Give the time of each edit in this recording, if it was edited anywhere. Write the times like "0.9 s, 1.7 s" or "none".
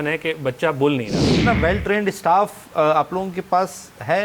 1.3 s